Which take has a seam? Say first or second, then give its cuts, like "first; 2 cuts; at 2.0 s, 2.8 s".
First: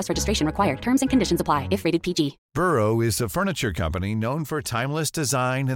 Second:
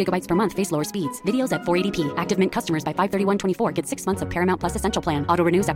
first; 1 cut; at 2.4 s